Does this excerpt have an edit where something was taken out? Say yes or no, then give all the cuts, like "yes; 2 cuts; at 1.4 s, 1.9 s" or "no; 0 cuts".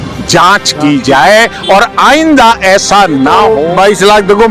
yes; 1 cut; at 3.5 s